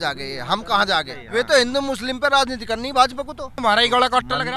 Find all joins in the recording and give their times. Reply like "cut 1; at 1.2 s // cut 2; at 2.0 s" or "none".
cut 1; at 1.2 s // cut 2; at 3.6 s